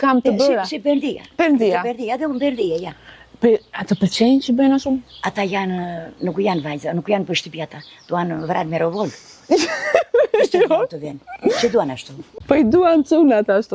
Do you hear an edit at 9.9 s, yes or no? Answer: no